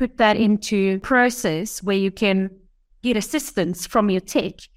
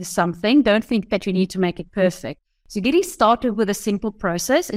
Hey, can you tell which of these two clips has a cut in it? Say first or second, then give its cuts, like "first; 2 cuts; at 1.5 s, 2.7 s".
first; 1 cut; at 1.0 s